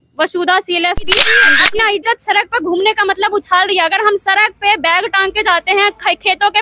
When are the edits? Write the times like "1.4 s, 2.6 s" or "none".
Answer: 1.4 s